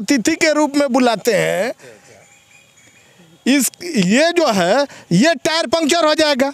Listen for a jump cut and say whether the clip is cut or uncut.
uncut